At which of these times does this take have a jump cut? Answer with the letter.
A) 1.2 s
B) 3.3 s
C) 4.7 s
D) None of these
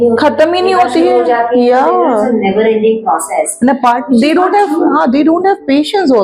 D